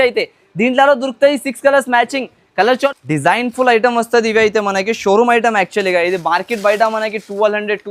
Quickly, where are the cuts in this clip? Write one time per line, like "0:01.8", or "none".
0:02.9